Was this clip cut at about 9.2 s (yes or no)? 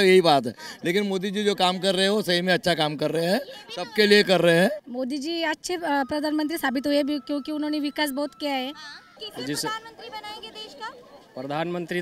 yes